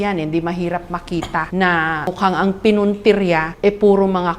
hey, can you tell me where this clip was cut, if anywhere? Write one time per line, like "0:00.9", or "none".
0:01.5
0:02.1
0:03.5